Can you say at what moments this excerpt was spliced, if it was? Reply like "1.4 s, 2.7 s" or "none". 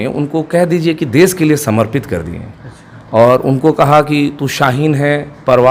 none